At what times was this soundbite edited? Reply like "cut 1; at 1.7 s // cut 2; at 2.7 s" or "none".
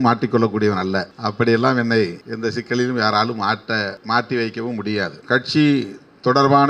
cut 1; at 1.1 s // cut 2; at 2.2 s // cut 3; at 4.0 s // cut 4; at 5.2 s